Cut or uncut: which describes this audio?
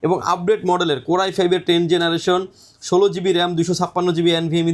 uncut